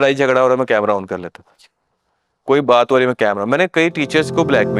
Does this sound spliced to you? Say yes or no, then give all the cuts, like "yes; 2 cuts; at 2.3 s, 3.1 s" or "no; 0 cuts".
no; 0 cuts